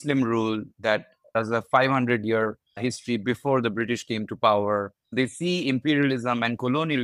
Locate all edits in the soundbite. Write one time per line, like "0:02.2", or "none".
0:05.0